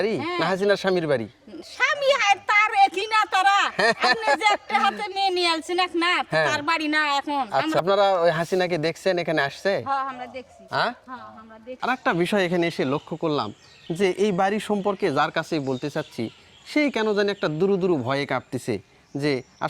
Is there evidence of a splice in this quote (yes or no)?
yes